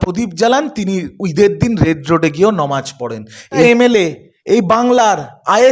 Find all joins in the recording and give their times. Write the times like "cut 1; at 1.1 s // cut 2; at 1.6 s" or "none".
cut 1; at 3.6 s